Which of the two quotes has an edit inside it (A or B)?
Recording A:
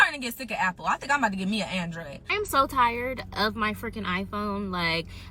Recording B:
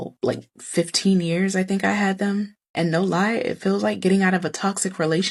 A